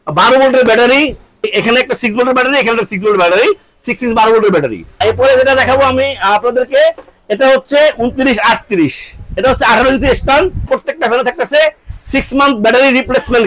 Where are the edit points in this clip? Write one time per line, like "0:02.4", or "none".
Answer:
0:01.4
0:05.0
0:10.6